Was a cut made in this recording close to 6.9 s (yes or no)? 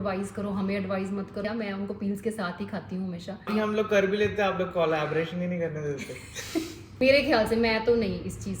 yes